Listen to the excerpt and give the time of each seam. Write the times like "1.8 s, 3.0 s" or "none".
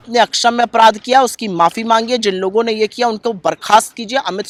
none

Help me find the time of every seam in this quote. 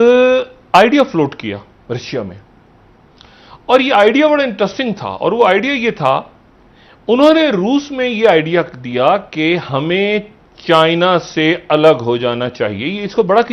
none

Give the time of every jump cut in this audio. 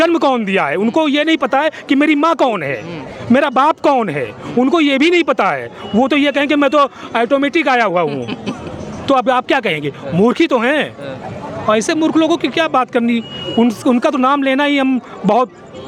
none

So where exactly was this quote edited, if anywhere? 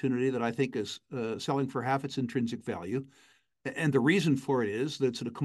none

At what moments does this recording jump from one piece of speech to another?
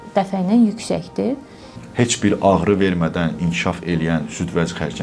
1.8 s

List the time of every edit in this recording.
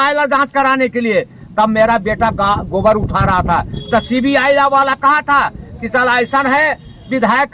none

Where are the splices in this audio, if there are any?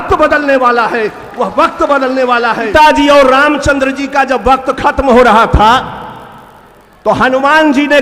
2.7 s

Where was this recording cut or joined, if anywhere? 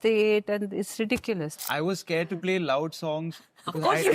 1.5 s

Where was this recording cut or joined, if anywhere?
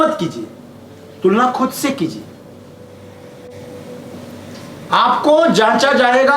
none

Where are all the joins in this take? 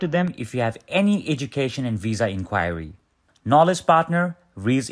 none

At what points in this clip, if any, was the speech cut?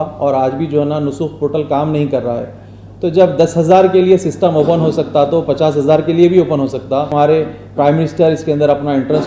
7.1 s

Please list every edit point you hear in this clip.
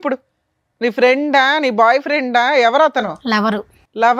none

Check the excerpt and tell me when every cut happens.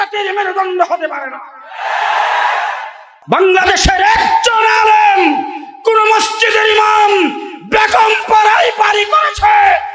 3.1 s

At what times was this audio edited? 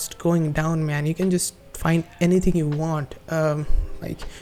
none

